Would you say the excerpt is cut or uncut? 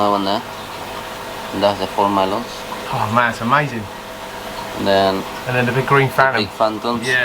uncut